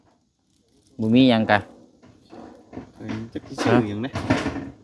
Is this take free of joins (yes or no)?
yes